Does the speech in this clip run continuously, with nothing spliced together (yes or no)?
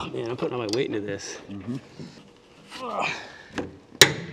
yes